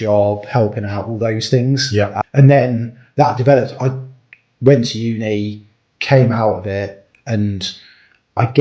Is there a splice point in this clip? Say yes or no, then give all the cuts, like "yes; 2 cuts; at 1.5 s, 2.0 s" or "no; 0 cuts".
yes; 1 cut; at 2.2 s